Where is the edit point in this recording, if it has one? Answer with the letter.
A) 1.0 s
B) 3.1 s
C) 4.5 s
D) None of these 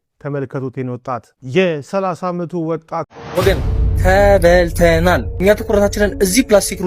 B